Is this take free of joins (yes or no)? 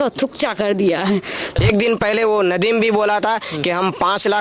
no